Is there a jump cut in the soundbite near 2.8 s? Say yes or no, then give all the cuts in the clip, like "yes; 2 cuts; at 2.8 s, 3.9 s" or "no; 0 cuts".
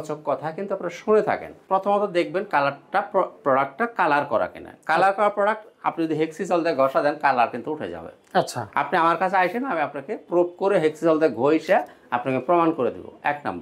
no; 1 cut; at 1.5 s